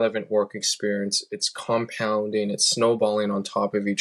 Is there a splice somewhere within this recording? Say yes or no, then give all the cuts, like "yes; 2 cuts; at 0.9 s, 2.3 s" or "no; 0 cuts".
no; 0 cuts